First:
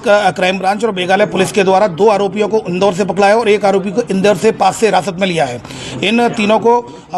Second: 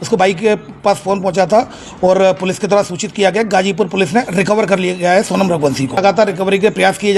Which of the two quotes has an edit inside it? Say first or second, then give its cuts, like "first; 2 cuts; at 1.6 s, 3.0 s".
second; 1 cut; at 6.0 s